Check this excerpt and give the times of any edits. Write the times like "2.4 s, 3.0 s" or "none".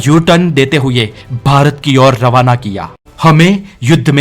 3.0 s

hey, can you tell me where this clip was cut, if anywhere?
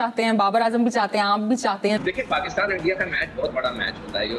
1.9 s

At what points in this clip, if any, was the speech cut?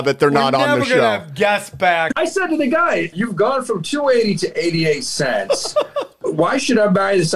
2.1 s, 3.1 s, 6.2 s

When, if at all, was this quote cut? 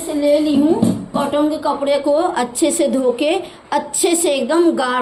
none

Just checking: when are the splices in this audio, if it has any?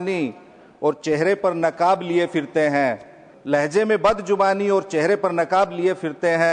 none

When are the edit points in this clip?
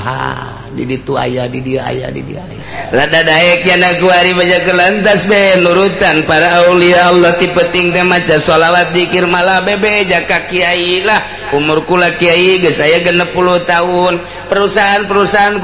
2.7 s

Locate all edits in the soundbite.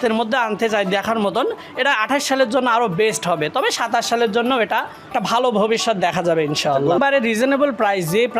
5.1 s, 7.0 s

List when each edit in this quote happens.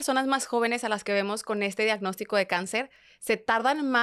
none

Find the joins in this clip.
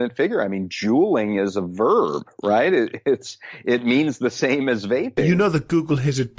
5.3 s

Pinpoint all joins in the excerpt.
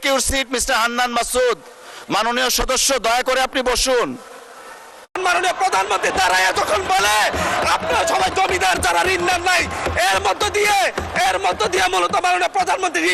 5.2 s

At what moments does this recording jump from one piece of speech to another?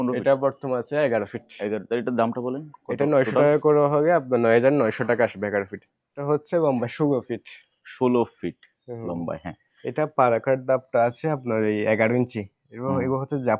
6.2 s

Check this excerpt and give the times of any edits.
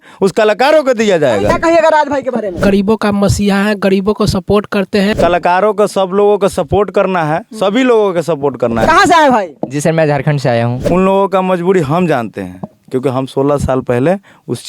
1.5 s, 2.6 s, 5.1 s, 8.8 s, 10.8 s

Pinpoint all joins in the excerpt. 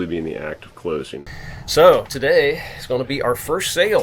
1.3 s

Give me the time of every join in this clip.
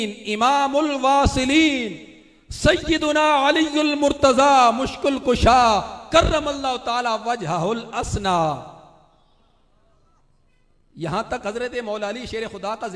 none

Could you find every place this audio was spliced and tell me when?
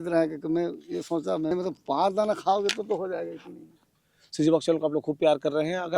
1.5 s, 4.1 s

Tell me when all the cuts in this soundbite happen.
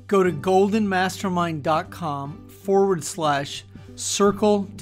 none

